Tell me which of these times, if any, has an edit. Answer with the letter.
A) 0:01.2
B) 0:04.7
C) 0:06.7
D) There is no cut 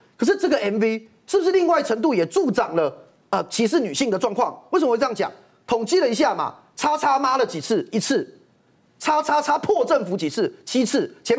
D